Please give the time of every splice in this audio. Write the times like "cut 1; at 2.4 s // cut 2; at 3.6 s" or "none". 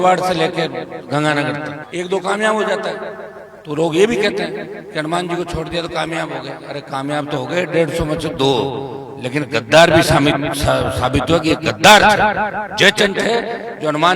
cut 1; at 1.8 s